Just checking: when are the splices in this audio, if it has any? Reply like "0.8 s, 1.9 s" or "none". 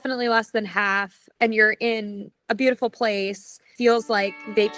1.2 s, 2.3 s, 3.7 s